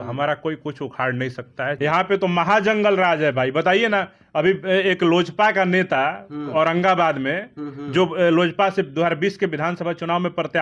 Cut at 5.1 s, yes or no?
no